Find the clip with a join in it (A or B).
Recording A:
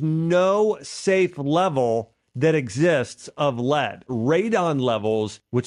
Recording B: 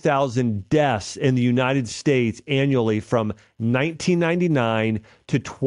A